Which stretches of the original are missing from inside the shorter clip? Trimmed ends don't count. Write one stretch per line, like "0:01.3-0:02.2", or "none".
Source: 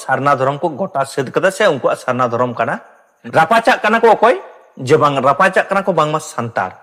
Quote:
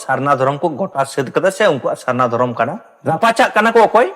0:02.9-0:03.2